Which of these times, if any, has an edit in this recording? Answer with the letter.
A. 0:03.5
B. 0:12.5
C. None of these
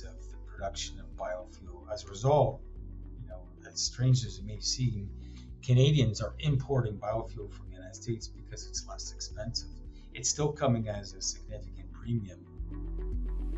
B